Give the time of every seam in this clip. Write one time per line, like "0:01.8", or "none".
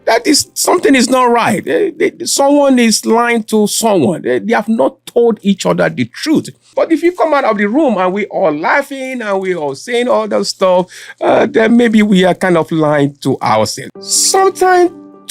0:06.7